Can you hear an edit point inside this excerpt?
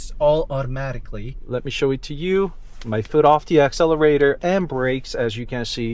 no; 0 cuts

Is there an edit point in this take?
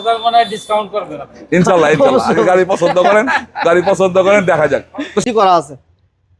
yes; 1 cut; at 5.2 s

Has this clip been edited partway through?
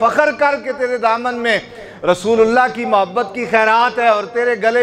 no; 0 cuts

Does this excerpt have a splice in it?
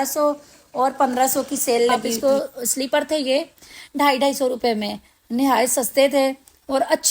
yes; 1 cut; at 2.1 s

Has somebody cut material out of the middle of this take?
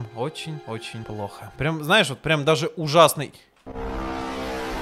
yes; 1 cut; at 1.1 s

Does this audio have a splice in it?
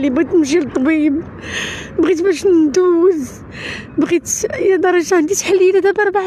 no; 0 cuts

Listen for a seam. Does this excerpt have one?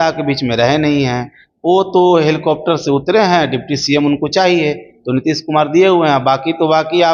no; 0 cuts

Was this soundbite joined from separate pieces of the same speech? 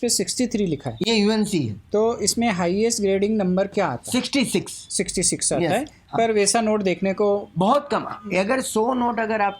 no; 0 cuts

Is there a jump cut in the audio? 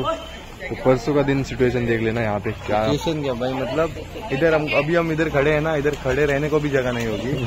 no; 0 cuts

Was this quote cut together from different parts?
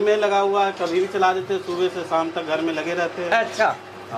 no; 0 cuts

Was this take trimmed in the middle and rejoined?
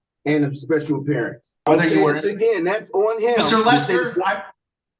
yes; 1 cut; at 1.7 s

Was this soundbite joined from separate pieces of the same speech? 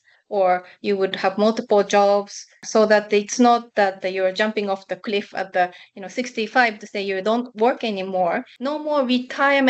yes; 2 cuts; at 2.6 s, 8.5 s

